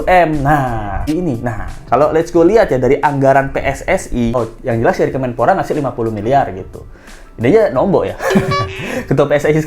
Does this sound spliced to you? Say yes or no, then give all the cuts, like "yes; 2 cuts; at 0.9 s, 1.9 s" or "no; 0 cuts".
yes; 2 cuts; at 1.0 s, 4.3 s